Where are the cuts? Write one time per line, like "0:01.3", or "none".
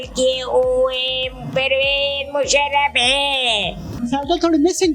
0:04.0